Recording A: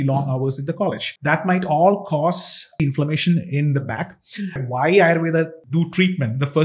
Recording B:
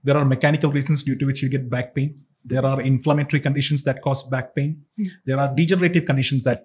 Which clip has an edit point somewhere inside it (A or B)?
A